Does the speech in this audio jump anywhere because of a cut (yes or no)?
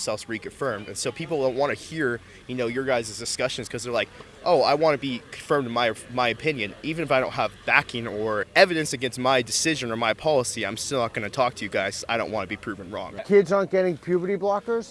yes